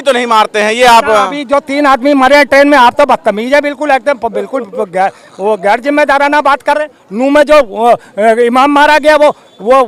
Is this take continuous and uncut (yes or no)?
yes